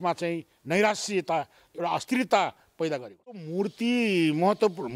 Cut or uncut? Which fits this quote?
cut